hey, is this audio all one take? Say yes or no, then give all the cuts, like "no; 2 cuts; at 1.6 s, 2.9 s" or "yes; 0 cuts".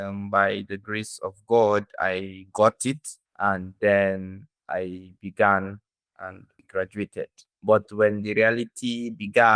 no; 1 cut; at 7.5 s